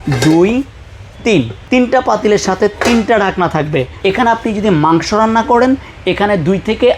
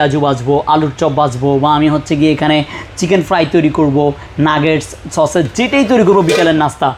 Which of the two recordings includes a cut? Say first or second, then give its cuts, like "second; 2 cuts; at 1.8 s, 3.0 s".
first; 2 cuts; at 1.6 s, 3.9 s